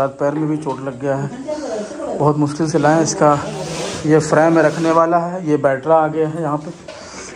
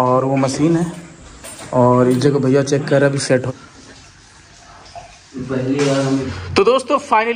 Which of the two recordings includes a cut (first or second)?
second